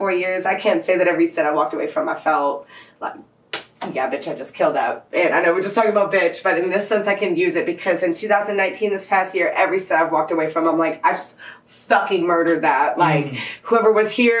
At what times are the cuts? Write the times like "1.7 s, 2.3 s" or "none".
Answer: none